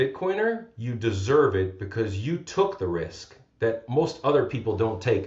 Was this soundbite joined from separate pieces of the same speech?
no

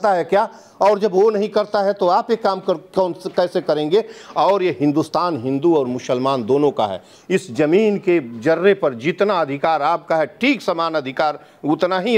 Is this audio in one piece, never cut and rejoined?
yes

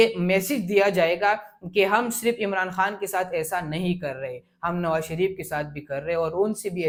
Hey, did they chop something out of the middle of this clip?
no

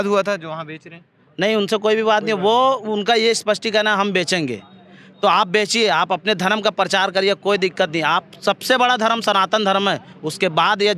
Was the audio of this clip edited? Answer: no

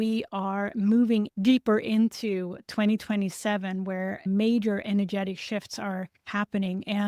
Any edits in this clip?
yes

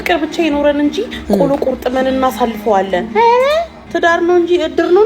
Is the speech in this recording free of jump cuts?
no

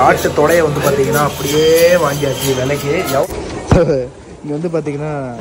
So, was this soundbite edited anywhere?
yes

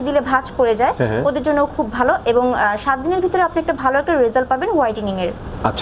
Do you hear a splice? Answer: no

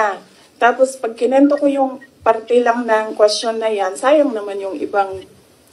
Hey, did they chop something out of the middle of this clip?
no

